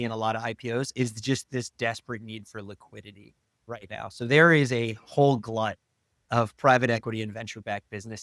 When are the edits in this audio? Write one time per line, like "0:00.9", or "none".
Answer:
none